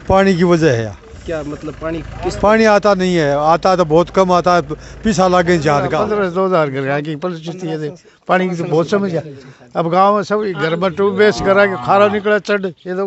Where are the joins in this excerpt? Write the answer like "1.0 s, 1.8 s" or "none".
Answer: 6.0 s